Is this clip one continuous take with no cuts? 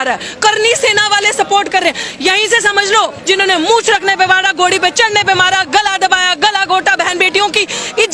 no; 1 cut; at 3.2 s

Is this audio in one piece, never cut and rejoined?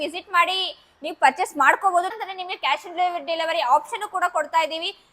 no; 1 cut; at 2.2 s

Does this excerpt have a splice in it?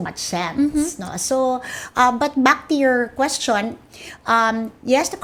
no; 0 cuts

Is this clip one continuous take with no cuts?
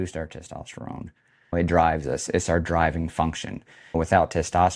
no; 1 cut; at 1.4 s

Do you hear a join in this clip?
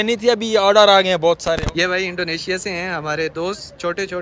yes; 1 cut; at 1.6 s

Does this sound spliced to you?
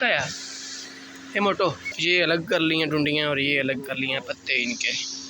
yes; 1 cut; at 1.9 s

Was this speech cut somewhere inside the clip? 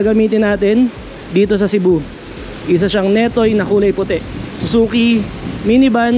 no; 0 cuts

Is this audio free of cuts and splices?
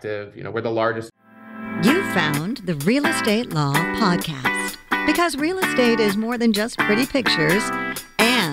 no; 1 cut; at 1.1 s

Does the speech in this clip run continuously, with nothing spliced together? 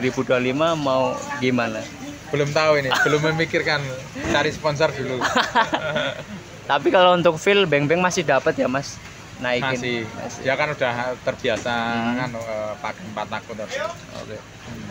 yes; 0 cuts

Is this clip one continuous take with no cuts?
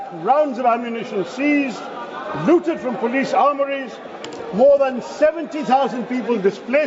yes; 0 cuts

